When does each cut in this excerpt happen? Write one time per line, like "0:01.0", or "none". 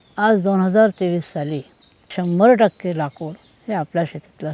0:02.1